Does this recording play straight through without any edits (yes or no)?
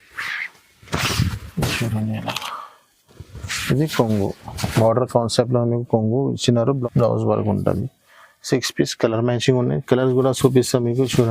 no